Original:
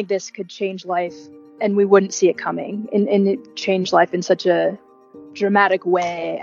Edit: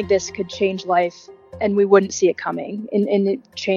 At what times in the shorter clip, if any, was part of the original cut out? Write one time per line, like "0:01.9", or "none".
none